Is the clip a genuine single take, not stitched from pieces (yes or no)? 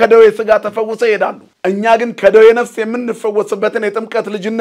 no